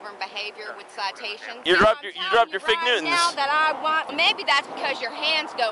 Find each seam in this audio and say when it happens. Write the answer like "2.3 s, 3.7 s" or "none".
1.6 s, 4.1 s